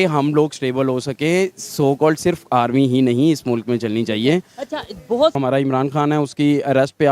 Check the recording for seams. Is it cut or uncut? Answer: cut